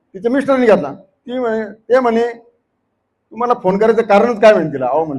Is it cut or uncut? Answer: uncut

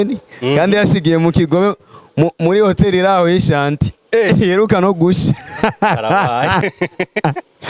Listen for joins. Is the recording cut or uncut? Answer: uncut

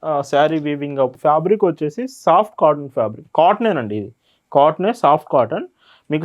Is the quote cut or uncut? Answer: cut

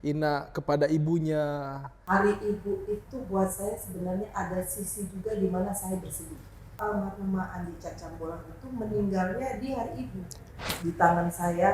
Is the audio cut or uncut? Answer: cut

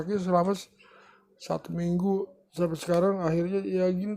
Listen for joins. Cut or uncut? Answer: cut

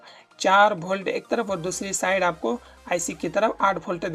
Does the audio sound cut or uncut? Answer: uncut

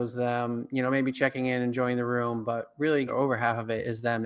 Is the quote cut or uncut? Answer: cut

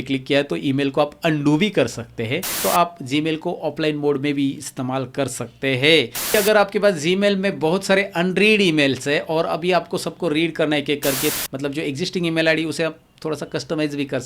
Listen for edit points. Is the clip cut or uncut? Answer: cut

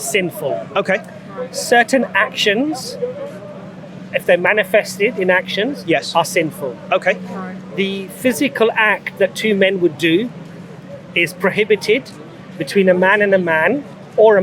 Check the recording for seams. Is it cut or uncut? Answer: uncut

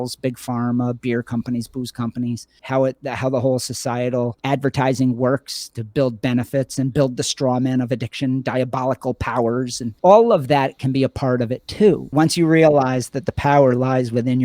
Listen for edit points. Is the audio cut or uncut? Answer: cut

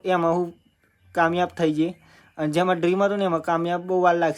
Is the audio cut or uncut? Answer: uncut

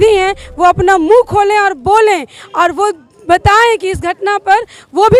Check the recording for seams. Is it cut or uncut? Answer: uncut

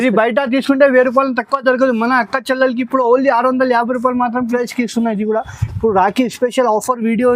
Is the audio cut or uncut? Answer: cut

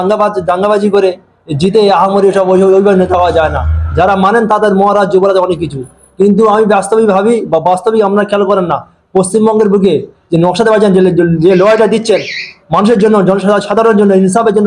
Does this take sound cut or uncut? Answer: uncut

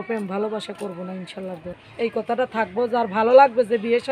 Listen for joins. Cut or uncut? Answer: cut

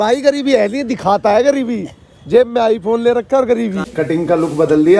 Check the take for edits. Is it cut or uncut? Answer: cut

